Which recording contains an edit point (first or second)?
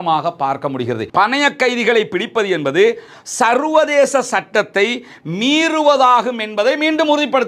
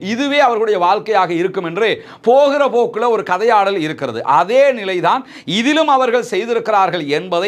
first